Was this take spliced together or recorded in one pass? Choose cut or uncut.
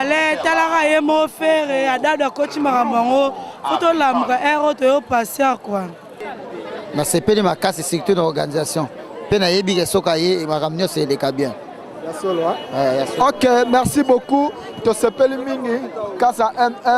cut